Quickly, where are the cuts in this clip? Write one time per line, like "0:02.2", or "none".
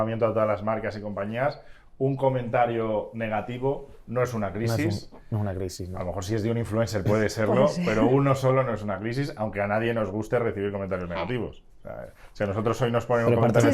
none